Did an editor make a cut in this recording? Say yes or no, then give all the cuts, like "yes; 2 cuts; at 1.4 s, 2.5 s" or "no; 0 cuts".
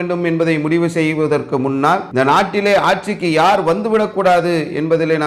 yes; 1 cut; at 2.1 s